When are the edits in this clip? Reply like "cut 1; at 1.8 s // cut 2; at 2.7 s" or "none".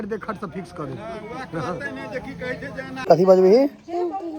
cut 1; at 3.0 s